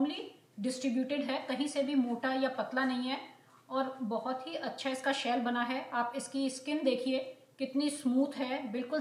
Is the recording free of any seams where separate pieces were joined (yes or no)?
yes